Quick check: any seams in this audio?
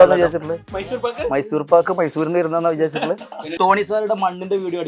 yes; 1 cut; at 3.5 s

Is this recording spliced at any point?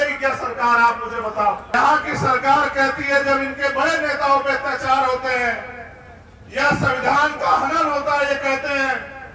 yes; 1 cut; at 1.6 s

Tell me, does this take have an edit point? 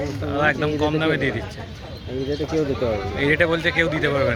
no; 0 cuts

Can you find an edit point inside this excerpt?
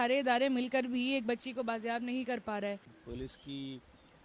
yes; 1 cut; at 3.0 s

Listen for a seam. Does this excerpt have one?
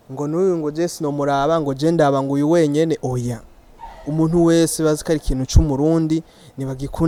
no; 0 cuts

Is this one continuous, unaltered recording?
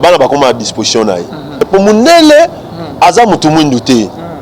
no; 1 cut; at 1.6 s

